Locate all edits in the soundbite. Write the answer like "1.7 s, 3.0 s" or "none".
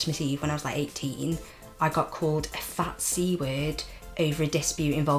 none